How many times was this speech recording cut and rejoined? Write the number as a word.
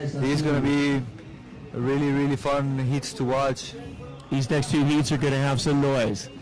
one